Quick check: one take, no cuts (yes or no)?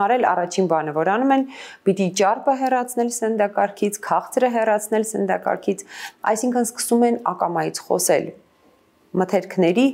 yes